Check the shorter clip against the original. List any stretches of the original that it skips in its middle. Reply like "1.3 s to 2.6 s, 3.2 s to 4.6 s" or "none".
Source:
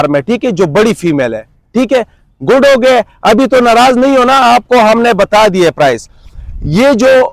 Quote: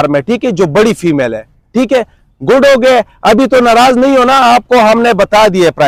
none